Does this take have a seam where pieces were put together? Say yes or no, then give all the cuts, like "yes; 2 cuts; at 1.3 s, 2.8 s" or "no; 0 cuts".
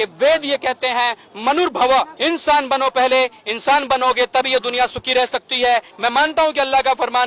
yes; 2 cuts; at 2.1 s, 5.9 s